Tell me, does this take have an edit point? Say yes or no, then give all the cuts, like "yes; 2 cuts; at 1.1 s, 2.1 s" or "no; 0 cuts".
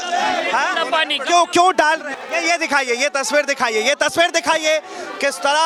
no; 0 cuts